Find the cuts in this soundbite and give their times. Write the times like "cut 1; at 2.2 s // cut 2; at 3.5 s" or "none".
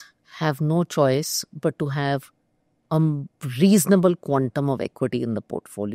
none